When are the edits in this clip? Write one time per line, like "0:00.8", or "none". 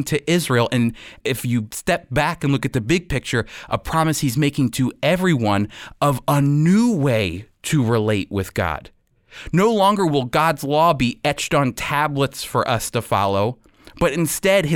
0:01.2